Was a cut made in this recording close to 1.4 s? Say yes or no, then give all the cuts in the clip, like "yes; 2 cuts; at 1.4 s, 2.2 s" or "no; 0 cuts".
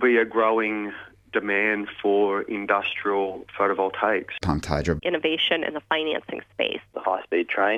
no; 2 cuts; at 4.8 s, 6.9 s